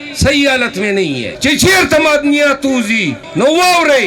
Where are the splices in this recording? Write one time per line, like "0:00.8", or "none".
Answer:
0:01.3
0:03.2